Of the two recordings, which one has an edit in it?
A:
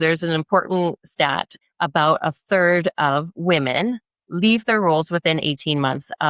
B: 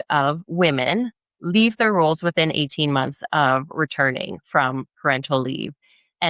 A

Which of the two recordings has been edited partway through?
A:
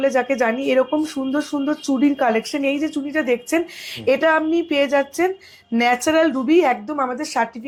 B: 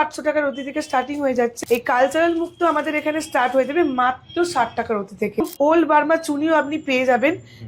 B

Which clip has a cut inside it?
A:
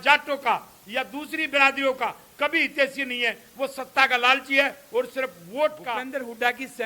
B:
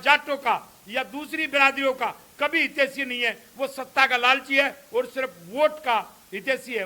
A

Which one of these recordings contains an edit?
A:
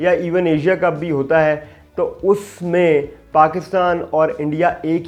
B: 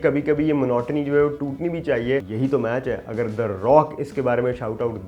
B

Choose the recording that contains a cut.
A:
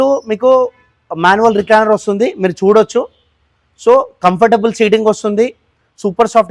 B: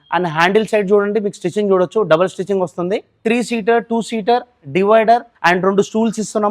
B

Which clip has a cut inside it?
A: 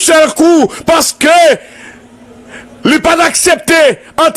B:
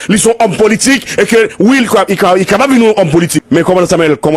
B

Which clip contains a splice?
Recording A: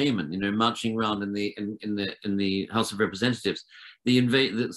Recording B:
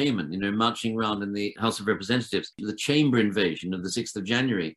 B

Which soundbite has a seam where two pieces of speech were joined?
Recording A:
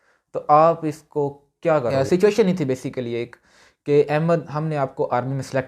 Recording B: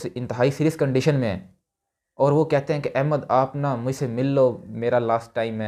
A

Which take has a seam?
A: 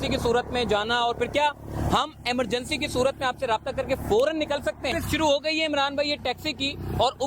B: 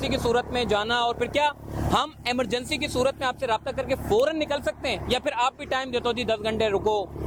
A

